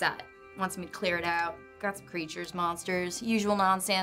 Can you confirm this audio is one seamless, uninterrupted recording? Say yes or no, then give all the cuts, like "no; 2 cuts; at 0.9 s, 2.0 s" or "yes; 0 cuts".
yes; 0 cuts